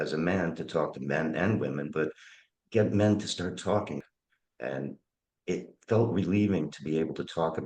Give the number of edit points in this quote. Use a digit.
1